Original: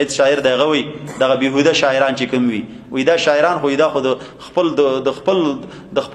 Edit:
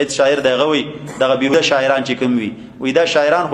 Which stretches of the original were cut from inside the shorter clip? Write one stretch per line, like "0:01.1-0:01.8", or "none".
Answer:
0:01.5-0:01.6